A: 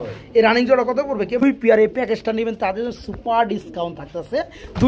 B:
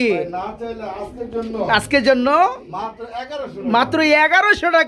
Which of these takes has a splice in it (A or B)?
A